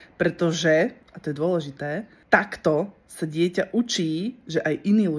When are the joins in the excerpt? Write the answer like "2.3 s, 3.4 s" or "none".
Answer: 1.1 s, 2.1 s